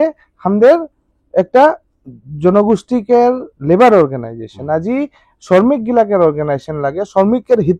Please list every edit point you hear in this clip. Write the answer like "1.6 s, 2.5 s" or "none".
none